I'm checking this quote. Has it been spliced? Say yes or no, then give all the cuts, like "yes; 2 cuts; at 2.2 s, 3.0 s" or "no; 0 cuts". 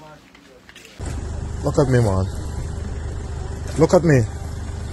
yes; 1 cut; at 1.0 s